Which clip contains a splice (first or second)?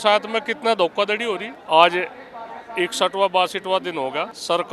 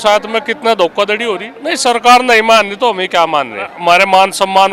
second